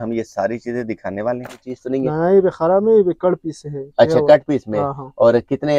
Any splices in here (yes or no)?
yes